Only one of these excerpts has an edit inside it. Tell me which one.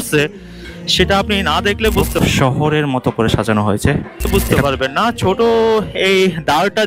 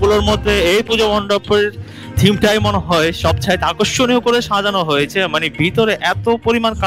first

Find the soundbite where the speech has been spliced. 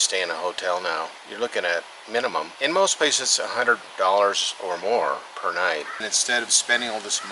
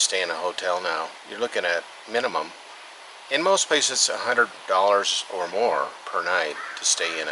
first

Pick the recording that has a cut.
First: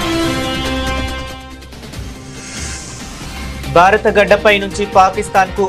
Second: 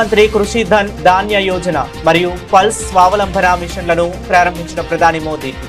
first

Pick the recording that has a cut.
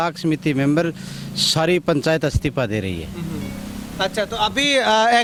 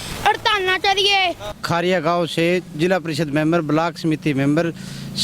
second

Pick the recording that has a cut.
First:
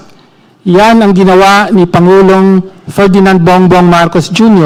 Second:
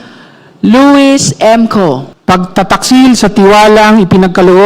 second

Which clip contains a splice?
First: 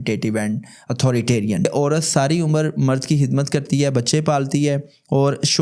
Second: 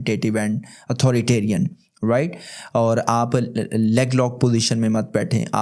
first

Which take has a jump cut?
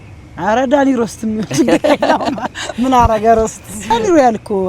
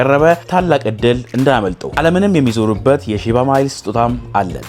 first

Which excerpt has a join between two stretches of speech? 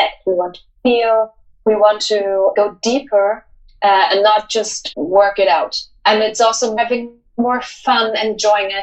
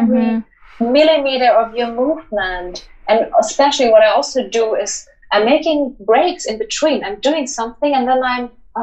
first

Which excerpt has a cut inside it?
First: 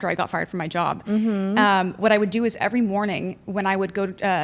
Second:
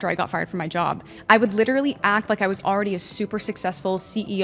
second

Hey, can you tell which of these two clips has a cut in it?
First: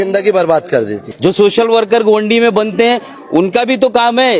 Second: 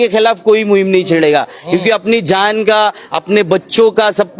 first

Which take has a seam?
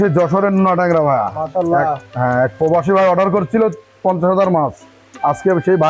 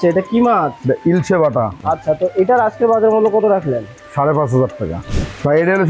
second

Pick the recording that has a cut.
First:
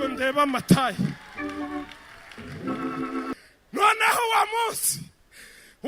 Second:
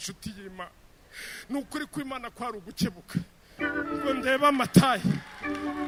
first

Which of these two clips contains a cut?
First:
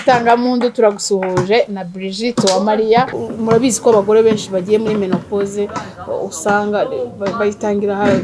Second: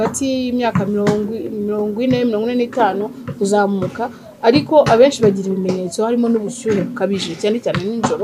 first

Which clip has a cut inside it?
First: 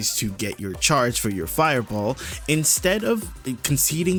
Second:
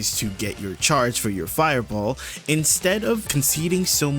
second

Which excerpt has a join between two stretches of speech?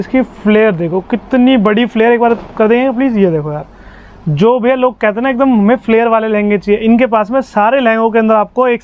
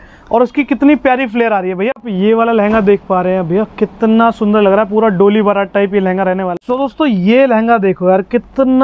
second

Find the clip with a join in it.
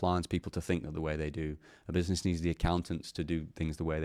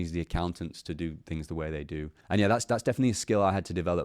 second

